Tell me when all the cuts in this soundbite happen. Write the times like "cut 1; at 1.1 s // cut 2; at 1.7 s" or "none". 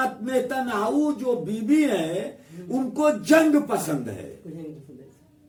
none

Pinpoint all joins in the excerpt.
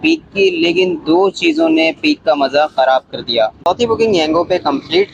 cut 1; at 3.6 s

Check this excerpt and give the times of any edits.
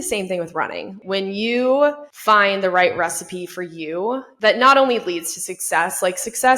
cut 1; at 0.9 s // cut 2; at 2.1 s // cut 3; at 4.3 s

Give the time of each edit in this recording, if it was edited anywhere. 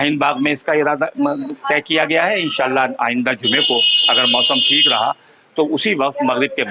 none

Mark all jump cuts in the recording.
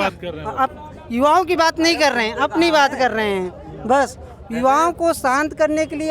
none

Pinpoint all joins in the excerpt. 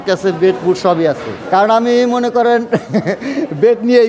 cut 1; at 1.3 s

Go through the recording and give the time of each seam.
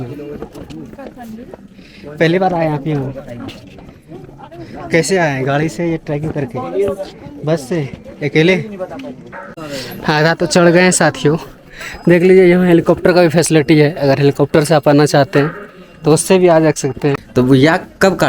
cut 1; at 9.5 s // cut 2; at 17.2 s

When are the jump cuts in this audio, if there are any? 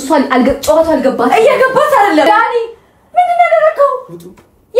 cut 1; at 2.3 s

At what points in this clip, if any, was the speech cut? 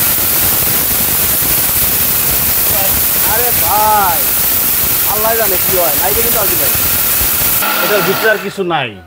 cut 1; at 7.6 s

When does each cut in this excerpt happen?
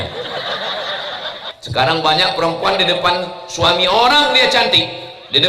cut 1; at 1.5 s

